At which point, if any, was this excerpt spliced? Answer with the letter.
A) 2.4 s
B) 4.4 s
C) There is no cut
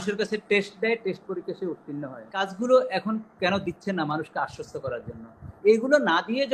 A